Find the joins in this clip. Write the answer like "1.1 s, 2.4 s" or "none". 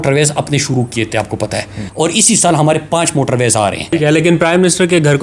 1.9 s, 3.9 s

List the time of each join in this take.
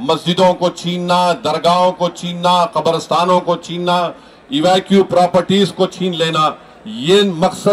none

